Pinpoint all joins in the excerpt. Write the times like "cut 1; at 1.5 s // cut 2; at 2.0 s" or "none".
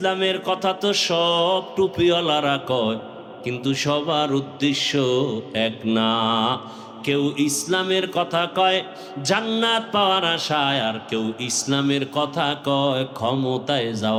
none